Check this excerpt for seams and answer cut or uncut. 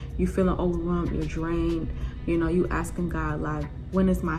uncut